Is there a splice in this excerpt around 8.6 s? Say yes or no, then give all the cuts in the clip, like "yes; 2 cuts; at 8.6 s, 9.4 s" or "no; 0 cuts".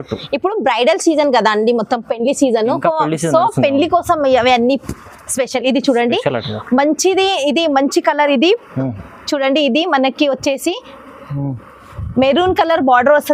no; 0 cuts